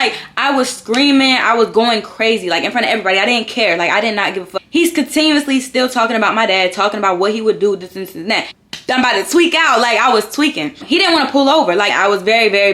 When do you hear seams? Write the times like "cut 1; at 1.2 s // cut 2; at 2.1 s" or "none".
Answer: cut 1; at 4.5 s // cut 2; at 8.5 s // cut 3; at 10.7 s // cut 4; at 11.9 s